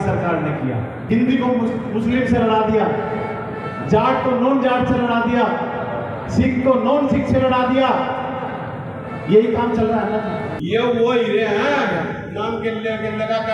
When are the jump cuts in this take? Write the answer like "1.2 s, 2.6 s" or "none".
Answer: 1.0 s, 10.5 s